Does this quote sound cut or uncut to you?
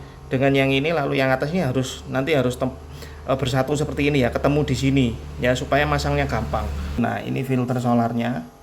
cut